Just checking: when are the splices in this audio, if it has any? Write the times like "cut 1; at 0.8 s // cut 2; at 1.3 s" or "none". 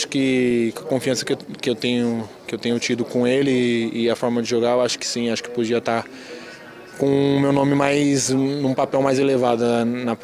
none